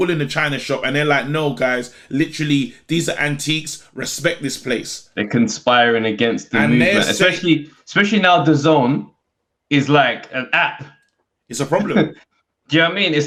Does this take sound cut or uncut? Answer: uncut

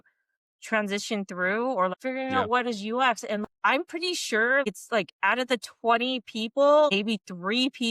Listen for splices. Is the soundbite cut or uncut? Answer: cut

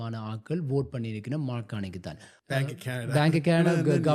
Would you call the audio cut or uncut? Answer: cut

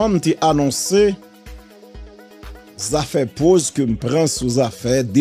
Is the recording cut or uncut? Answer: uncut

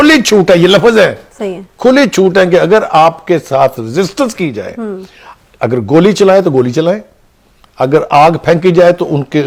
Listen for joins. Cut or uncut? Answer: uncut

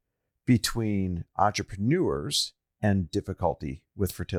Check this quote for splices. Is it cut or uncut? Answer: uncut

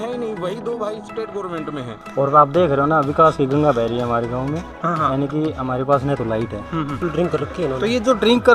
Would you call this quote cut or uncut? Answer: cut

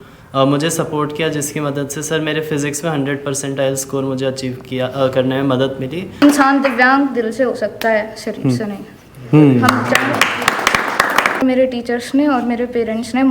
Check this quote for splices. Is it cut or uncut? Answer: cut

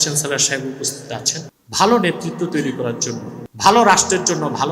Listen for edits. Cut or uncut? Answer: cut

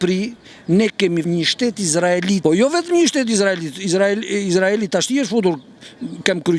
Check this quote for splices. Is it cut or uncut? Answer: cut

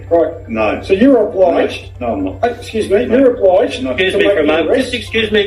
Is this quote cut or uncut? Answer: uncut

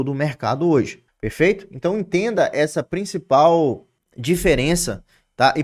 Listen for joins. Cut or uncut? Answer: cut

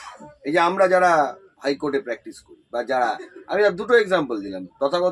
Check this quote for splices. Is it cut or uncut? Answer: uncut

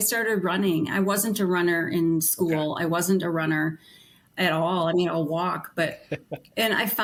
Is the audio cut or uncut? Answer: uncut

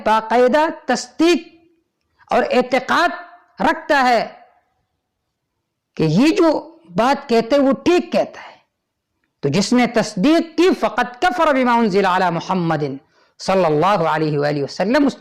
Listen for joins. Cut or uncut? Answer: uncut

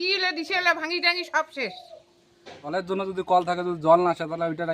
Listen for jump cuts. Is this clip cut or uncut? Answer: cut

